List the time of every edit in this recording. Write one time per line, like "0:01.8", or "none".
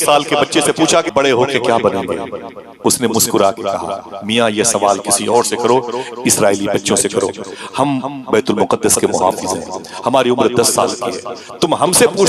0:01.1